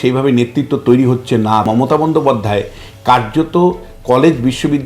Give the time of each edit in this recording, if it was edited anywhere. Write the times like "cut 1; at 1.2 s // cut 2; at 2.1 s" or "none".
cut 1; at 1.7 s